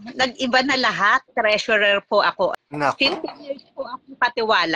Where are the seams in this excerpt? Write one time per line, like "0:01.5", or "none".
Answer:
0:01.2
0:02.6